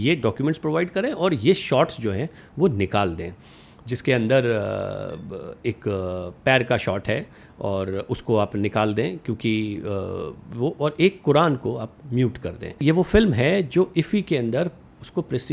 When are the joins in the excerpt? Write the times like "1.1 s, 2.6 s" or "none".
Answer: 12.8 s

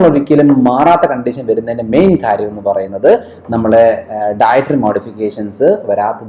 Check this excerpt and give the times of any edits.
none

